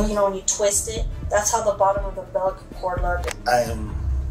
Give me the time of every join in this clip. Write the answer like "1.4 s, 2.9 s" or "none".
3.3 s

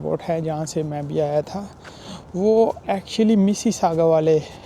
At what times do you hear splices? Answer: none

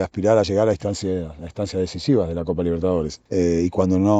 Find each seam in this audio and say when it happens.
3.2 s

